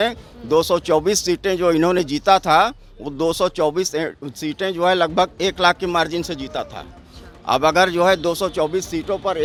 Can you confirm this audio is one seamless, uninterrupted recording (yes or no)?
yes